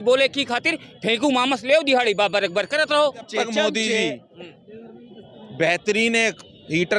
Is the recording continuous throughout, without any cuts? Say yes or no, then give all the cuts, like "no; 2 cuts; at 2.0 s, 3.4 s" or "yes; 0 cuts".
no; 1 cut; at 3.3 s